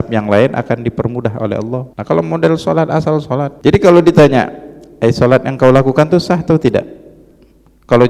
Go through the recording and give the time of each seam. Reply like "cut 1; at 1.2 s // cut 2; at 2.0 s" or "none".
cut 1; at 1.9 s // cut 2; at 3.5 s